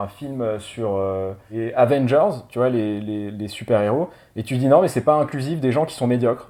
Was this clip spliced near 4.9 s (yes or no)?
no